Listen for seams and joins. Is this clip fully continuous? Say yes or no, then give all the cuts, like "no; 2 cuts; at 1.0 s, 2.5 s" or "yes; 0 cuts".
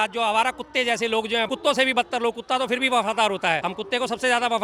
no; 2 cuts; at 1.5 s, 3.7 s